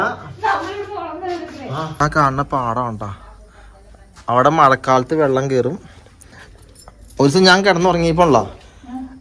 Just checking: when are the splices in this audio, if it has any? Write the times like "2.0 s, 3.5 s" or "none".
2.0 s